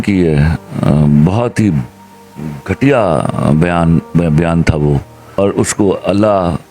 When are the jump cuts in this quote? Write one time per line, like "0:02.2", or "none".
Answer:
0:05.4